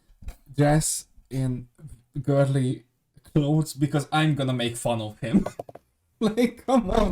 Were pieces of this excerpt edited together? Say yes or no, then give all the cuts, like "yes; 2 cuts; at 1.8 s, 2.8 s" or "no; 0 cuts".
no; 0 cuts